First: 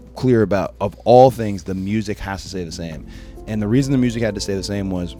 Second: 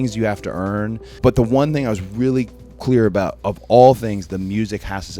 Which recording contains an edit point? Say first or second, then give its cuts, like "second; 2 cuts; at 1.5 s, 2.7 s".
second; 1 cut; at 1.1 s